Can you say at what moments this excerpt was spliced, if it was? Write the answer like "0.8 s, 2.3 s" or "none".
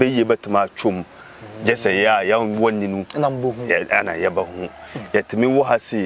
none